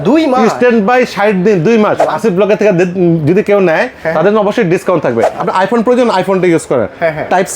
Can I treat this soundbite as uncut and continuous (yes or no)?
no